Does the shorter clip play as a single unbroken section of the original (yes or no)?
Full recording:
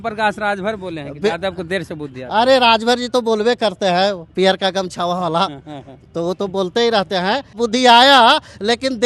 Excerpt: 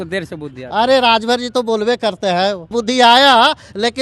no